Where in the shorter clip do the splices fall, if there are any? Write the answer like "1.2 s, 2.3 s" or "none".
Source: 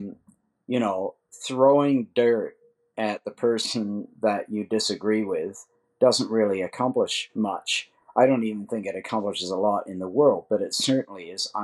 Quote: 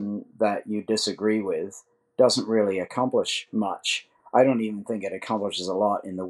none